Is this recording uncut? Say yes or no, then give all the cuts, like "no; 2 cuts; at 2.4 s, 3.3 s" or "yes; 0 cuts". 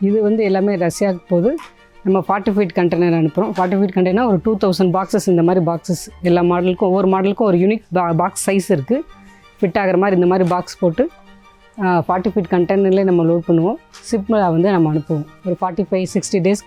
yes; 0 cuts